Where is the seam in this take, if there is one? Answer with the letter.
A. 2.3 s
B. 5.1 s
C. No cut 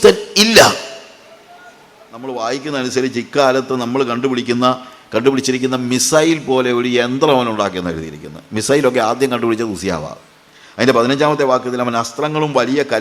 A